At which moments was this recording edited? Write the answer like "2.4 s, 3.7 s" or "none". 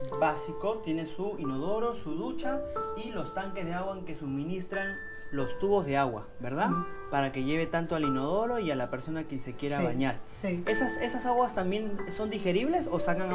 none